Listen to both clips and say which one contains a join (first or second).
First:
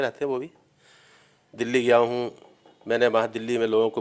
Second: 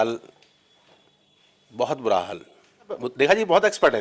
second